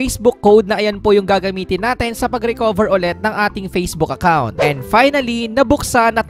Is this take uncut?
no; 1 cut; at 4.6 s

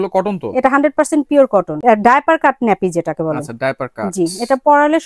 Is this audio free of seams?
no; 1 cut; at 1.7 s

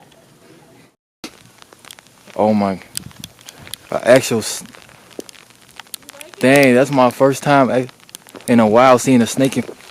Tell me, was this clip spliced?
yes; 1 cut; at 1.0 s

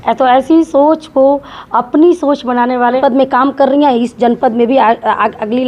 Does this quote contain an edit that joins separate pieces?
yes; 1 cut; at 3.0 s

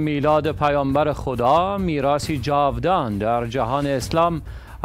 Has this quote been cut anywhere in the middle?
no; 0 cuts

